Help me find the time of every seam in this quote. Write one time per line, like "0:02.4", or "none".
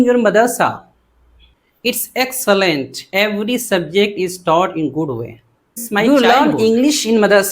0:05.7